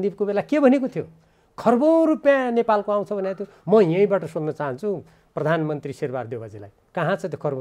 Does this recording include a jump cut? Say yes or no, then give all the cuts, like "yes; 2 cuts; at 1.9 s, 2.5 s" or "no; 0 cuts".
no; 0 cuts